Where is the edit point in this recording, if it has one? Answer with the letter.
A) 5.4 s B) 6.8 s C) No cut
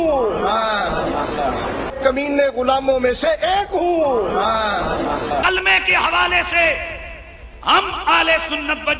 A